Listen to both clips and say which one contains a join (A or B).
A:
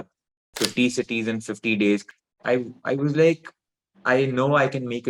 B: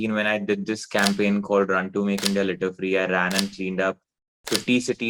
A